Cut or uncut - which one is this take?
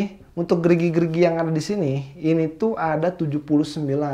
uncut